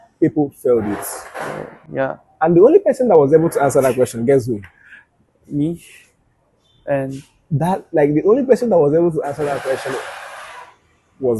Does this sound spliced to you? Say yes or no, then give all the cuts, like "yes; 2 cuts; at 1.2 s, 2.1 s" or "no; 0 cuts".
no; 0 cuts